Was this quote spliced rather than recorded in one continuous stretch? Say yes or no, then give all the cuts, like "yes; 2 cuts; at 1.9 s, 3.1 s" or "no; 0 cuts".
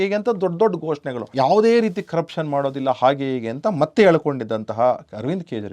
yes; 1 cut; at 1.3 s